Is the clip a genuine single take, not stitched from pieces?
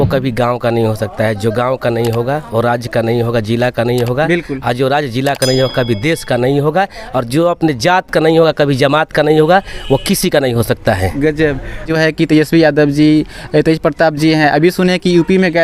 no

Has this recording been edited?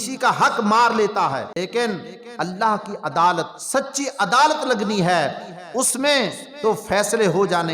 yes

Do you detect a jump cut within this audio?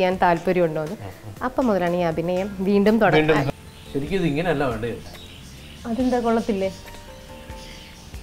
yes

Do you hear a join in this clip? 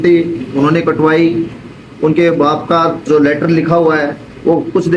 no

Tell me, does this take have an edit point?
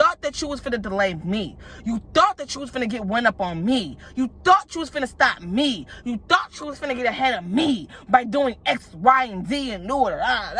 no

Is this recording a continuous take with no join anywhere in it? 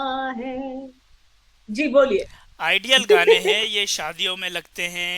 yes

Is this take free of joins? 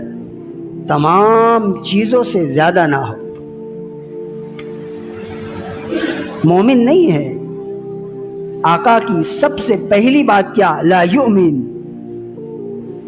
yes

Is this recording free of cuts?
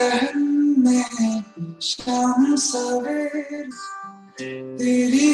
yes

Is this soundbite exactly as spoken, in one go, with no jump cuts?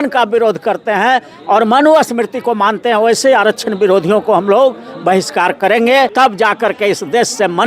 no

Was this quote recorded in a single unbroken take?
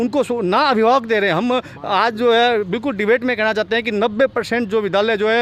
yes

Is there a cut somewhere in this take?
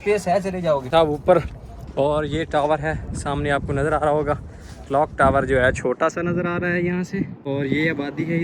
yes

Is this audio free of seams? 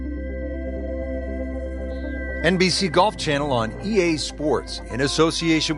no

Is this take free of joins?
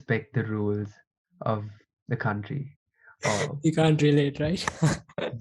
yes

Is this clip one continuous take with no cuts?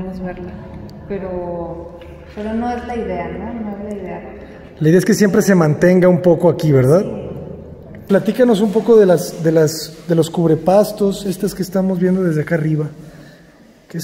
no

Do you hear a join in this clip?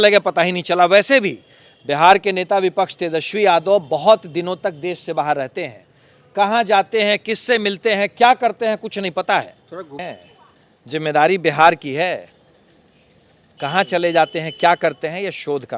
yes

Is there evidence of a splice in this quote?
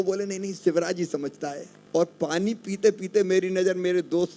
yes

